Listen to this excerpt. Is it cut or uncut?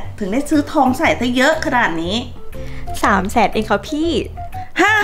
uncut